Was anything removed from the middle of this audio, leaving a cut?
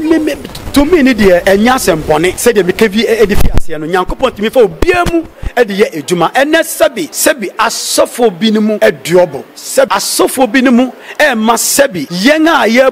yes; 6 cuts; at 1.4 s, 2.4 s, 7.1 s, 8.8 s, 9.9 s, 12.0 s

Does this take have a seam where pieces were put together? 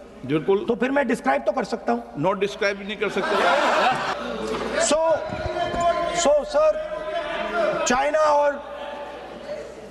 no; 0 cuts

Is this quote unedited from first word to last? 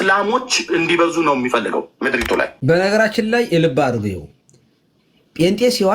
no; 1 cut; at 1.9 s

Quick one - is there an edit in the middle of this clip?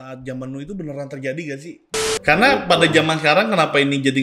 yes; 1 cut; at 2.2 s

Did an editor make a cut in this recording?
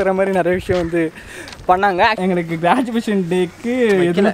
yes; 1 cut; at 2.2 s

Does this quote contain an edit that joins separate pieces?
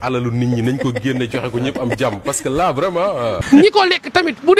yes; 1 cut; at 3.4 s

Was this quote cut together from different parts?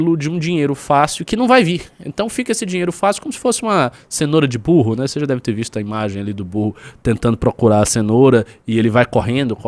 no; 0 cuts

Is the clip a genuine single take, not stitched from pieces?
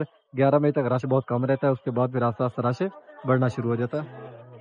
yes; 0 cuts

